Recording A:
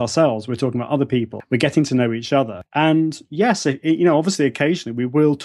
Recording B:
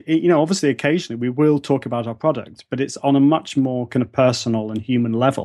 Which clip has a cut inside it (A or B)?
A